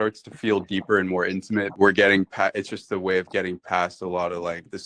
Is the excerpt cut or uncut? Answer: cut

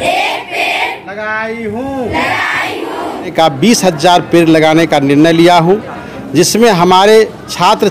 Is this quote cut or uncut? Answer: cut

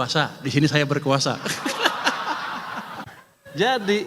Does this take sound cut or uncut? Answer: cut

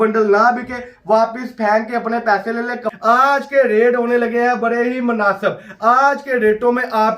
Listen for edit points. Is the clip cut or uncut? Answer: cut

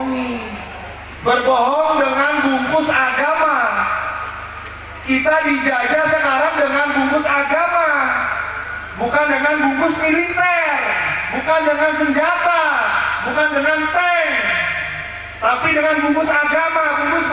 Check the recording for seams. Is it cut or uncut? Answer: uncut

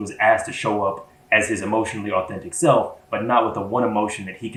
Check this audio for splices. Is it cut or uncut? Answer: uncut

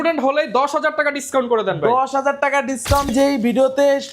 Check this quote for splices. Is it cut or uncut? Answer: cut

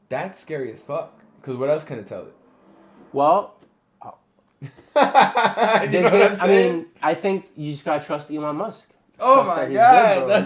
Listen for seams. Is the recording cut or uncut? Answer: uncut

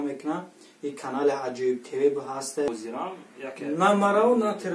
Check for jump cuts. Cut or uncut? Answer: cut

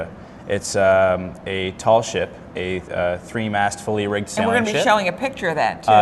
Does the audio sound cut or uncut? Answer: cut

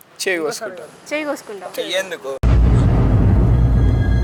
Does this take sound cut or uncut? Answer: uncut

